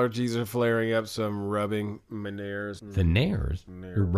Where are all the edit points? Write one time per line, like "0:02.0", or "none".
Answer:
0:02.8

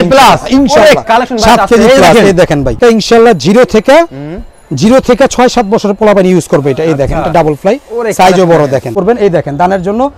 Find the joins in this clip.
0:02.8
0:09.0

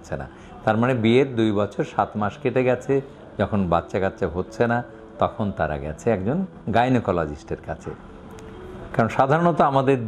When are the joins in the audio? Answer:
none

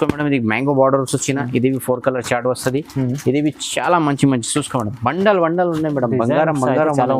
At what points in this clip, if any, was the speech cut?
none

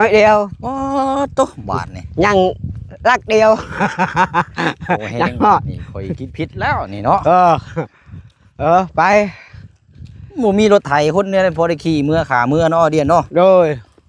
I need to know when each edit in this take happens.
none

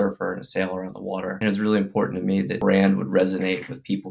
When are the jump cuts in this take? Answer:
0:01.4
0:02.6

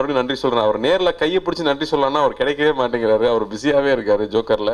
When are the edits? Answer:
none

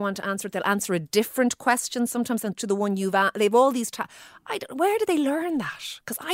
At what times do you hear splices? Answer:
none

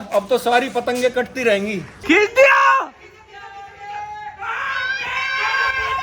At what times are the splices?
0:01.9

